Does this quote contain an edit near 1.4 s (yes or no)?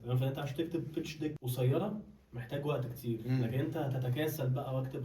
yes